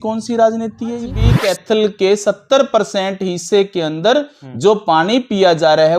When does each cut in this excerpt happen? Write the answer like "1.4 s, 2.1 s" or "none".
1.3 s